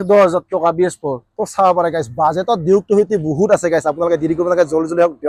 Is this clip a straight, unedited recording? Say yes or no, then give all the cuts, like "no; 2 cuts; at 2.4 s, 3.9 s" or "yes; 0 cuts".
yes; 0 cuts